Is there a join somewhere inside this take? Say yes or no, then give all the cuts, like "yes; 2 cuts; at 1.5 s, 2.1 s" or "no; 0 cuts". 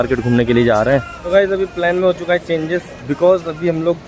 yes; 1 cut; at 1.2 s